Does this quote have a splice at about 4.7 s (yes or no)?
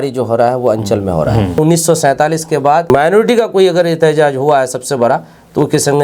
no